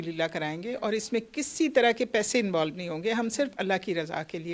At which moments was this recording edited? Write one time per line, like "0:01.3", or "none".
none

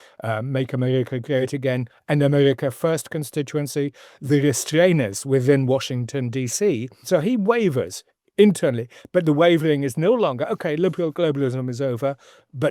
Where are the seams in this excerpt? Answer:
0:07.0

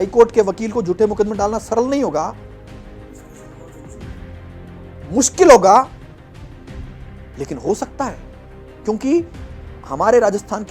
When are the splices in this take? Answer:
0:05.9
0:07.4

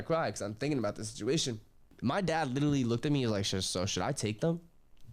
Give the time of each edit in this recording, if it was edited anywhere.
0:01.9

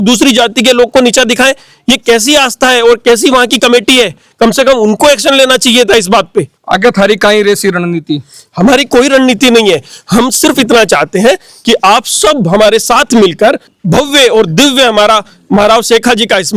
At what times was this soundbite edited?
none

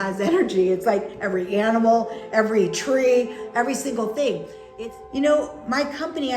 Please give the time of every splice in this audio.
0:04.6

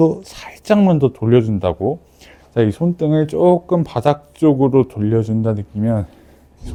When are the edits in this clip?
none

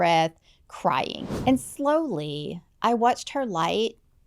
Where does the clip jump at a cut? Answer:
0:01.2

